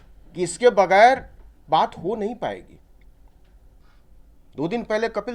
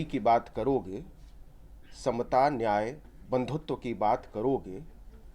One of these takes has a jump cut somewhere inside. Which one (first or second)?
first